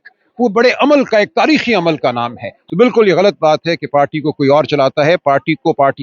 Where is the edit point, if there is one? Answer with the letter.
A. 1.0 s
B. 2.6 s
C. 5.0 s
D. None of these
B